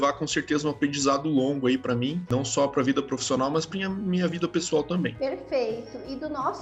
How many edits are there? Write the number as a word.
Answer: zero